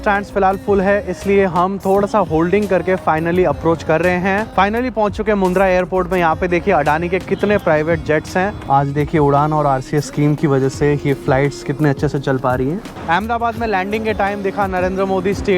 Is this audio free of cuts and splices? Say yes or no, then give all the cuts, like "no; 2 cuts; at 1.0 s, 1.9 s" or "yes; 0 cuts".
no; 3 cuts; at 4.5 s, 8.6 s, 12.9 s